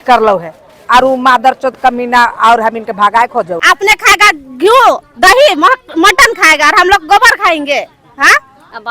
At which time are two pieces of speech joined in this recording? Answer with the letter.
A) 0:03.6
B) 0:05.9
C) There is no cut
A